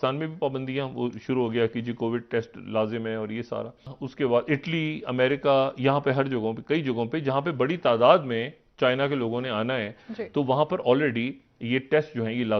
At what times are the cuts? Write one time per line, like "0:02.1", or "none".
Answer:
0:04.0